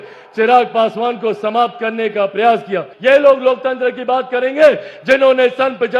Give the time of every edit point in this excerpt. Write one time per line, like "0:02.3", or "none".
0:02.9